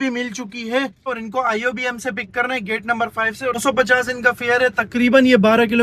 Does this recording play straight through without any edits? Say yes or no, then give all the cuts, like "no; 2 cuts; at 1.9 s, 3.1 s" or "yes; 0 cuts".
yes; 0 cuts